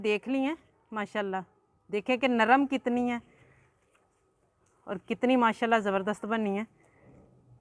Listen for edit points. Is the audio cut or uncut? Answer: uncut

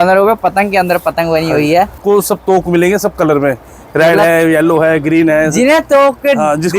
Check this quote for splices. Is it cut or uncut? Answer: cut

